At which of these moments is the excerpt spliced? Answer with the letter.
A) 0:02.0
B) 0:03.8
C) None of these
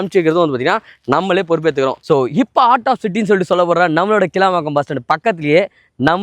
A